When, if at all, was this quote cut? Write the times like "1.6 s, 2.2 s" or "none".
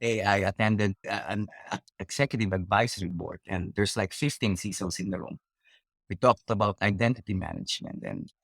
1.0 s